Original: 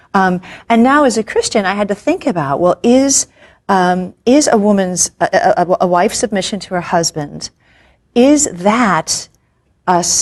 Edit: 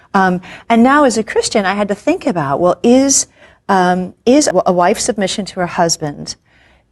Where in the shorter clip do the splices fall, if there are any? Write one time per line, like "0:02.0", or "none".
0:04.5